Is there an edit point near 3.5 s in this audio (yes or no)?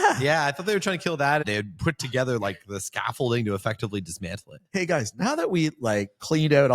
no